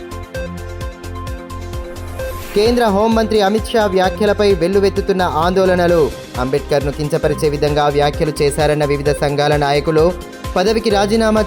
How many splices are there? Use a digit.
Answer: 1